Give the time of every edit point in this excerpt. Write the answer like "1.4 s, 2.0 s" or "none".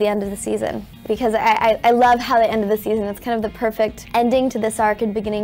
1.0 s, 4.0 s